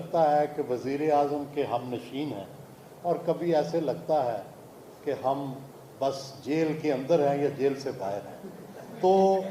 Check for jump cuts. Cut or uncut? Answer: uncut